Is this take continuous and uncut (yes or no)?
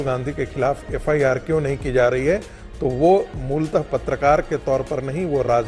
yes